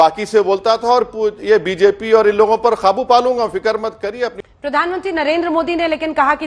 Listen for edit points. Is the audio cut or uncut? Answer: cut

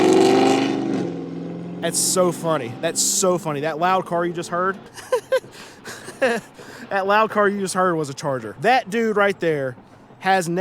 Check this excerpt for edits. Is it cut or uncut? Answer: cut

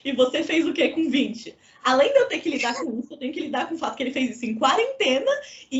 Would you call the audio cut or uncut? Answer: uncut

